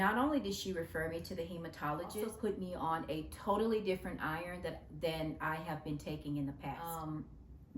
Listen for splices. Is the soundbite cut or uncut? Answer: cut